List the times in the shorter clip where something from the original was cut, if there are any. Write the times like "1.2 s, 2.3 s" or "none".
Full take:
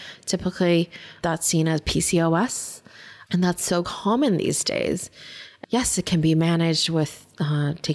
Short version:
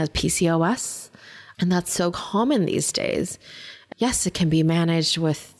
none